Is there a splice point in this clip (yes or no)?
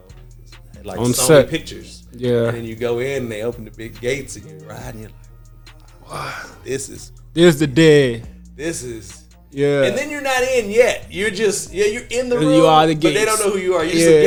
no